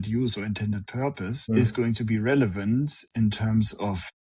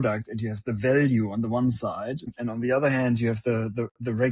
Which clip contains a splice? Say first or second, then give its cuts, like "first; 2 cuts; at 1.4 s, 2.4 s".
second; 1 cut; at 2.3 s